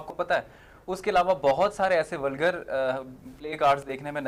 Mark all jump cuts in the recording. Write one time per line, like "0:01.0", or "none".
none